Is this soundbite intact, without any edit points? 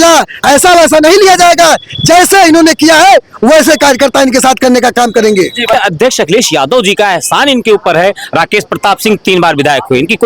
no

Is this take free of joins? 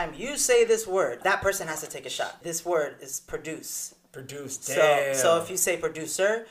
no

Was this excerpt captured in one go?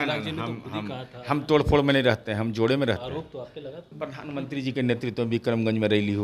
no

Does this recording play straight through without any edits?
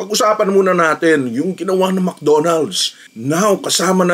no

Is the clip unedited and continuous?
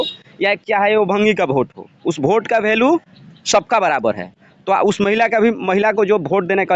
yes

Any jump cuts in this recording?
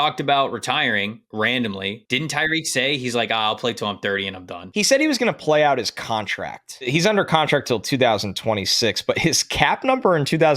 yes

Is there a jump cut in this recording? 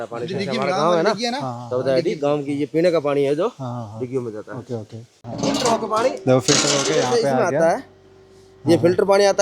yes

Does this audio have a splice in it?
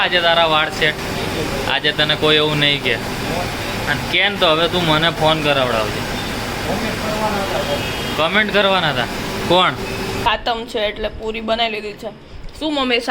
yes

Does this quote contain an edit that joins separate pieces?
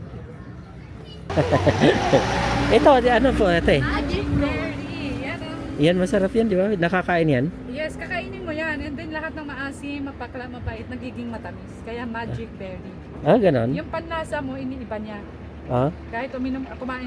yes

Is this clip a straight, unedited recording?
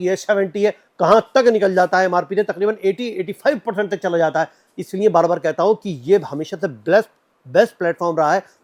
yes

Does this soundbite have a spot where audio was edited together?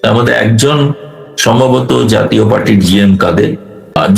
no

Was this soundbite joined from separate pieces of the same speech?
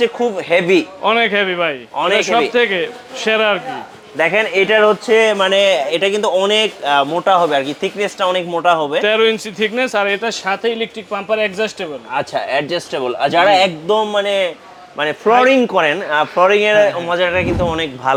no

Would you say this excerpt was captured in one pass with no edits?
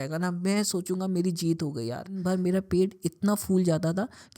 no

